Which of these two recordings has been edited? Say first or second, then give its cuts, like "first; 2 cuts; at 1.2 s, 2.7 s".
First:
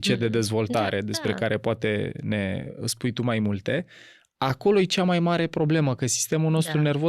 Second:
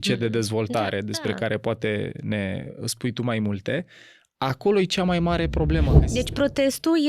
second; 1 cut; at 6.0 s